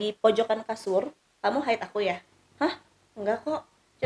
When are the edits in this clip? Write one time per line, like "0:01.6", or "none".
0:01.2